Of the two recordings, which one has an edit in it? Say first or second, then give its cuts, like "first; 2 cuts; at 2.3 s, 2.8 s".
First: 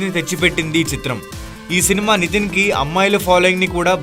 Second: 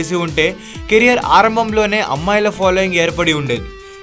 second; 1 cut; at 2.0 s